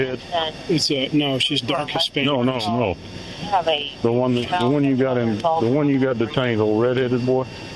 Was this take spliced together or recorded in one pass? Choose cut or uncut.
uncut